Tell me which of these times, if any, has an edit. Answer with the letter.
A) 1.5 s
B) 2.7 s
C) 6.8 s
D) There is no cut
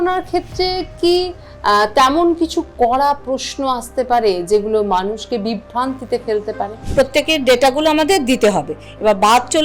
C